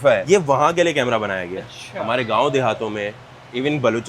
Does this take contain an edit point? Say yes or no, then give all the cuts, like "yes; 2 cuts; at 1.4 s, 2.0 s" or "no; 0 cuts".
no; 0 cuts